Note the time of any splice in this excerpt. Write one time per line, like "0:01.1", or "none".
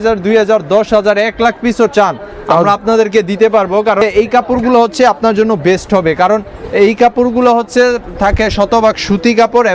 0:04.0